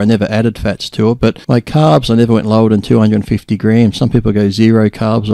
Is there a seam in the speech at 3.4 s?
no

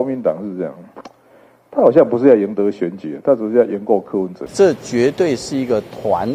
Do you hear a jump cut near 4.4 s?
yes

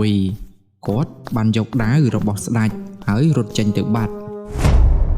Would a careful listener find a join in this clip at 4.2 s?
yes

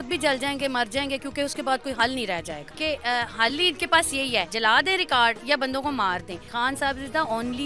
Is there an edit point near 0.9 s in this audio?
no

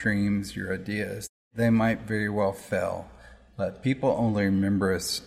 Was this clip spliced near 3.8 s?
no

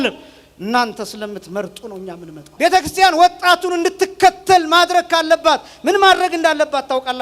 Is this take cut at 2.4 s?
yes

